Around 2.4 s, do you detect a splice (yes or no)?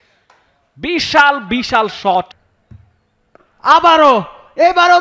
yes